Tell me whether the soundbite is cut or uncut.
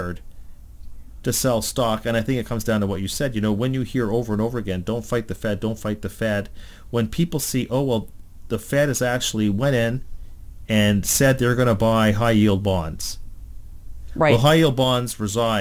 uncut